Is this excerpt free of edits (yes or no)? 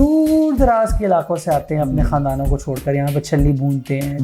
yes